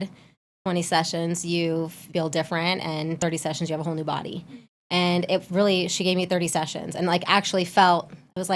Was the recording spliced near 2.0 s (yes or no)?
yes